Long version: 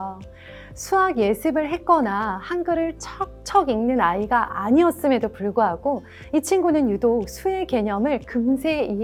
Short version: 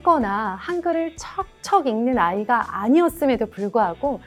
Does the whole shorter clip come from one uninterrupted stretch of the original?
yes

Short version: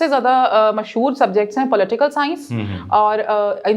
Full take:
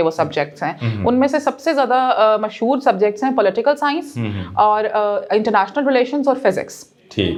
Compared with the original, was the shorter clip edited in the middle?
no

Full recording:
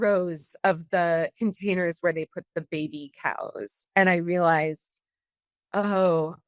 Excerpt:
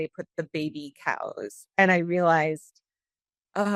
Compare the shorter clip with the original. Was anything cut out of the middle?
no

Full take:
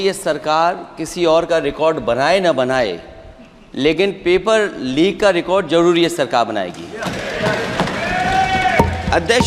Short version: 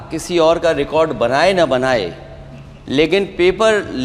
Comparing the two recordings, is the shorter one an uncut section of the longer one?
yes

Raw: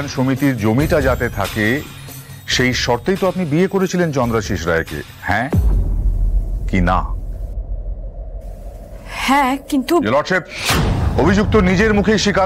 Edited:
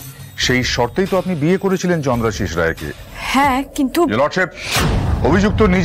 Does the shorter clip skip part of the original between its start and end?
yes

